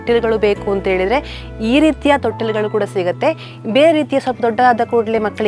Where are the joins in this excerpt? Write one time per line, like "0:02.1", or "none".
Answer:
none